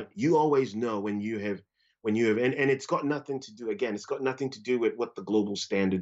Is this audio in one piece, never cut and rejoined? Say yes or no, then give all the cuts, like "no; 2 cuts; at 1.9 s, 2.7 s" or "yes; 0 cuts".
yes; 0 cuts